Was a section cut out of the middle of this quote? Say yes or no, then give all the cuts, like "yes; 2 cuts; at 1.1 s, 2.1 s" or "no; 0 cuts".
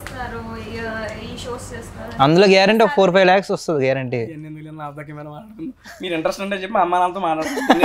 no; 0 cuts